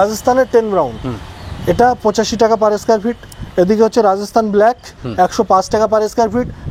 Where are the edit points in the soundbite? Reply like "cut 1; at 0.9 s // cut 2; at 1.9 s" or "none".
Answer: none